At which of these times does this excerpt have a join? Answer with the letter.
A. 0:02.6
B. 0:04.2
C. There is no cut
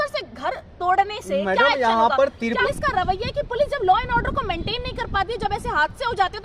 A